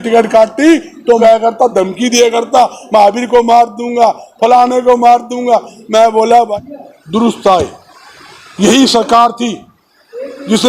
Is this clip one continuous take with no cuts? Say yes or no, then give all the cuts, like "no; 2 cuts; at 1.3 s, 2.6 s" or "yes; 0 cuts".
no; 2 cuts; at 1.2 s, 6.5 s